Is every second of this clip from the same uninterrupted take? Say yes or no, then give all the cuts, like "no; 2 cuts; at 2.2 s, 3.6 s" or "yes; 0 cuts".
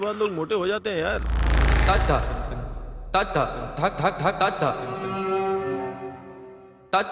yes; 0 cuts